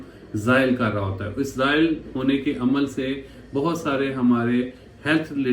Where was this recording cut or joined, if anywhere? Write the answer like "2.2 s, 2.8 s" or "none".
none